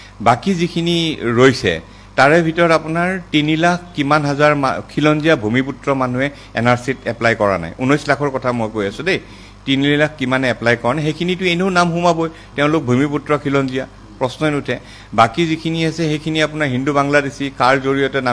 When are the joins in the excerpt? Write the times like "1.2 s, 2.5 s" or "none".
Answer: none